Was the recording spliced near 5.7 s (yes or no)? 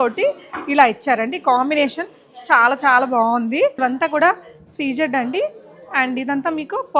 no